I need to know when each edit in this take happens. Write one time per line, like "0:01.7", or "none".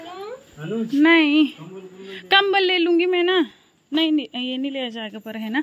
none